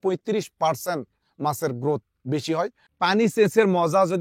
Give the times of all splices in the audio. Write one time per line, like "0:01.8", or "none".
0:02.8